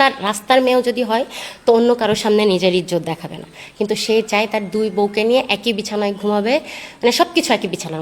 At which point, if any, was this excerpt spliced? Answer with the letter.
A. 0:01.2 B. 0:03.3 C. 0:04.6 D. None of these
D